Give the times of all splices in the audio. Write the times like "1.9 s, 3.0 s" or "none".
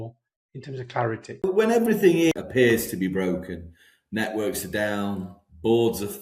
1.4 s, 2.3 s